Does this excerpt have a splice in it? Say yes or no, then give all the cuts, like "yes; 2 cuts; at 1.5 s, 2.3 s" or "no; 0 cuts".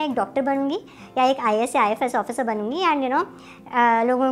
no; 0 cuts